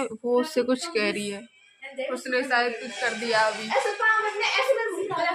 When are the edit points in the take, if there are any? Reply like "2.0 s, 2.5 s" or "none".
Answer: none